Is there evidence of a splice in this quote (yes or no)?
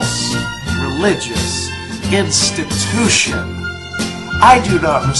no